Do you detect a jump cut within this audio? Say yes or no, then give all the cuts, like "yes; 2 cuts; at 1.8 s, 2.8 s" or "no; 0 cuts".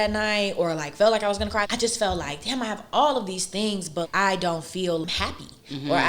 yes; 3 cuts; at 1.7 s, 4.1 s, 5.0 s